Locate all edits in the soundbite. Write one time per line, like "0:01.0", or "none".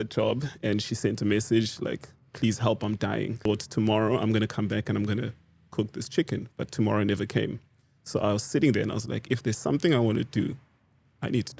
0:03.5

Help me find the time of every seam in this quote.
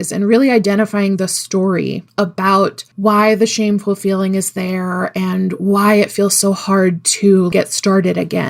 0:02.0
0:02.9
0:07.5

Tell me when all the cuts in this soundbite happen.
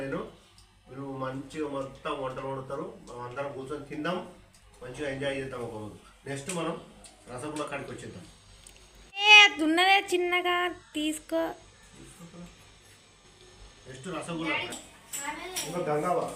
0:14.7

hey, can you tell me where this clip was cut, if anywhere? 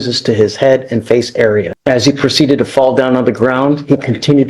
0:01.7

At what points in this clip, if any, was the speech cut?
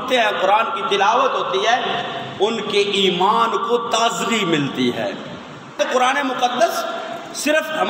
0:05.8

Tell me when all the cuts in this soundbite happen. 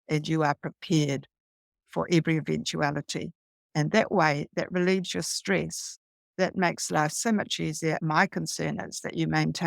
0:08.0

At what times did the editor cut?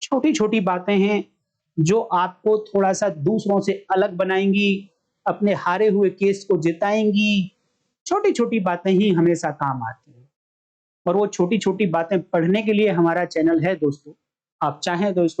none

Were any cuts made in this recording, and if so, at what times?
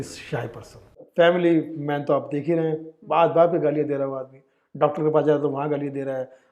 0:00.9

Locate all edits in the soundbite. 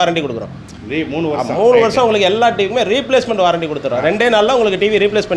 none

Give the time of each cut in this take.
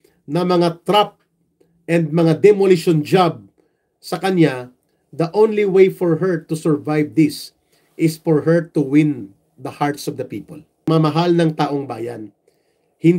0:10.8

